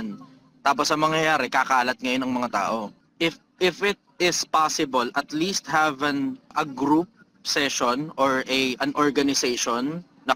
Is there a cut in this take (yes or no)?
yes